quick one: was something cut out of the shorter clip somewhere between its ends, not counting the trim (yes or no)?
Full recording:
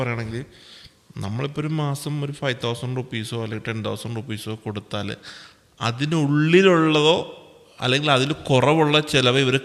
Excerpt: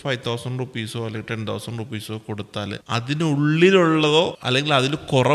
yes